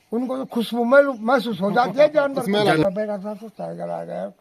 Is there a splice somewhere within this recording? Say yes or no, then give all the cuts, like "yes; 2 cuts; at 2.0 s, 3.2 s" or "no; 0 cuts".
yes; 1 cut; at 2.9 s